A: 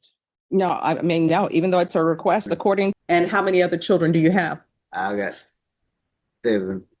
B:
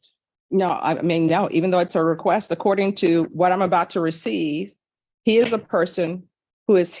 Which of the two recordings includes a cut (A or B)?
A